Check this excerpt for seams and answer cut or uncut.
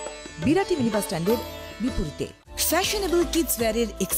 cut